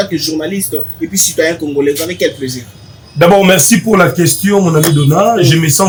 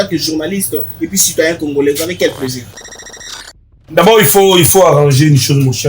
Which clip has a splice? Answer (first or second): second